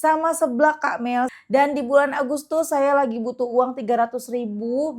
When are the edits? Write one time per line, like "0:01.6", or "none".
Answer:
0:01.3